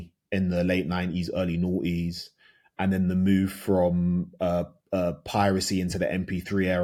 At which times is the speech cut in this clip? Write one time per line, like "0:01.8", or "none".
none